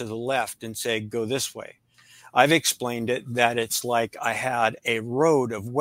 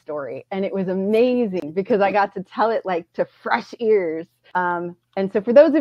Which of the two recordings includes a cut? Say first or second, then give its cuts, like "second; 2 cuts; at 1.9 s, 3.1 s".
second; 2 cuts; at 1.6 s, 4.3 s